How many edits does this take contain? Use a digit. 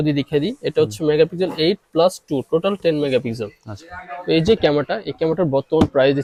0